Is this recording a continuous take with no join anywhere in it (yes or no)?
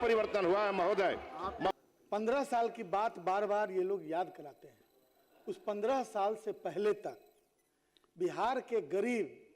no